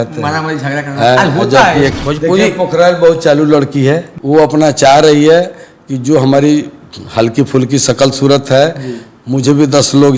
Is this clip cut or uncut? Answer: cut